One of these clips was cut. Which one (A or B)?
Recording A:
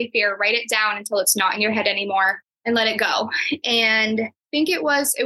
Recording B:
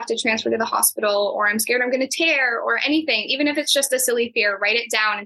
A